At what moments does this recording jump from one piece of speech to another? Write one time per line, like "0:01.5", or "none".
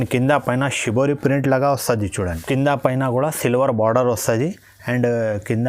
0:02.3